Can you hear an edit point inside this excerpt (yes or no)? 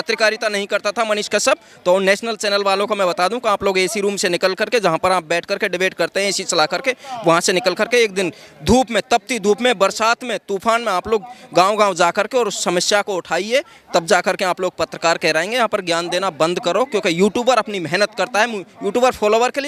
no